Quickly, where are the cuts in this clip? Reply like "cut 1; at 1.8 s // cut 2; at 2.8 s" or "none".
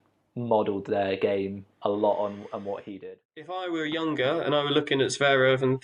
cut 1; at 3.3 s